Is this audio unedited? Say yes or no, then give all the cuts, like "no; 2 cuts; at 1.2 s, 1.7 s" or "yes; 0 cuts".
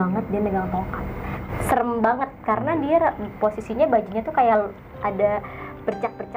no; 1 cut; at 1.5 s